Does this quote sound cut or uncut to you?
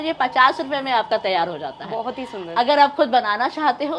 uncut